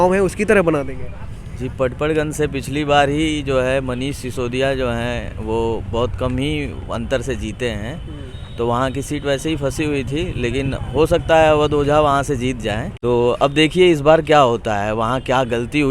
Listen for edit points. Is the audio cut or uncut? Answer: cut